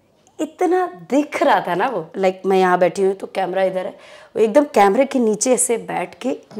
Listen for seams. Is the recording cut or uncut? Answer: cut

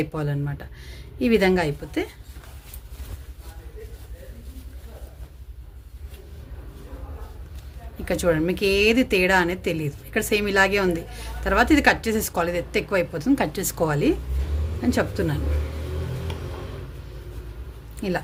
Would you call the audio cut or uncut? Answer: uncut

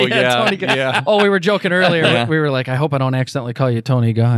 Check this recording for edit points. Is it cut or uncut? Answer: uncut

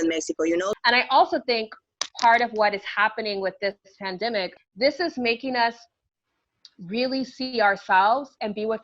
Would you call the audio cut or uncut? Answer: cut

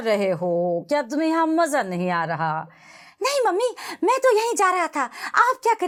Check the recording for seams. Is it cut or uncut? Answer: uncut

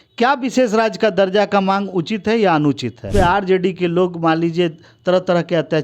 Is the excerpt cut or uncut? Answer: cut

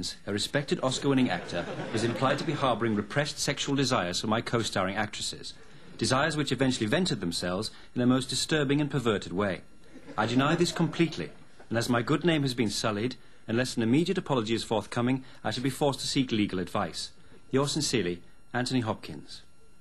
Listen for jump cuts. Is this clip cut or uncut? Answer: uncut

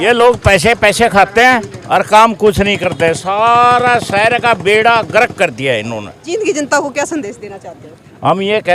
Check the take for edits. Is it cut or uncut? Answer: cut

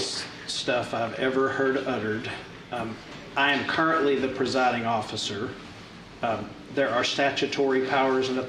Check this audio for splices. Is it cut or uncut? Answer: uncut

